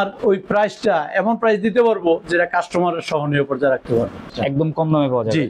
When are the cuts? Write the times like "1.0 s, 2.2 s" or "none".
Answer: 4.3 s